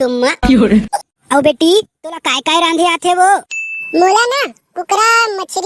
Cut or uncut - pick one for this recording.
cut